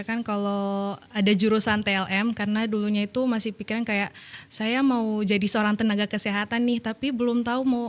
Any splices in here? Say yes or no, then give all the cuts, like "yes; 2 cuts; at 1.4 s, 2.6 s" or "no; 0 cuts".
no; 0 cuts